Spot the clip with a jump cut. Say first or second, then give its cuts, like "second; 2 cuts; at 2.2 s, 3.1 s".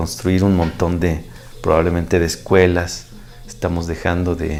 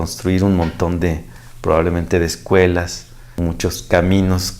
second; 1 cut; at 3.2 s